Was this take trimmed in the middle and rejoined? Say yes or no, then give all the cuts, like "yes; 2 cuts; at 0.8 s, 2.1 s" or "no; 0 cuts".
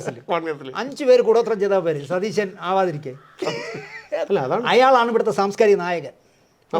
yes; 1 cut; at 4.2 s